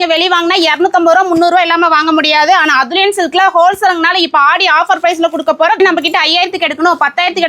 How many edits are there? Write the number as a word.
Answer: one